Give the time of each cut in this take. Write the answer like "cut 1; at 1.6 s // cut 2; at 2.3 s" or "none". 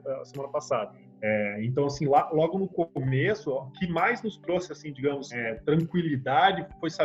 cut 1; at 1.0 s // cut 2; at 3.8 s // cut 3; at 5.4 s